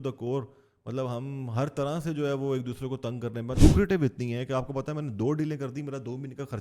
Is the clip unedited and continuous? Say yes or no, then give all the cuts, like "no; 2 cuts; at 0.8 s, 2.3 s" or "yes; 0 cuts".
no; 1 cut; at 3.6 s